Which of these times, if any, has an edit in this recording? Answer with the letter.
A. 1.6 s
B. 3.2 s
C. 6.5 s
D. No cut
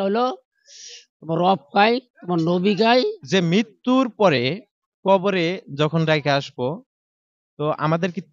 B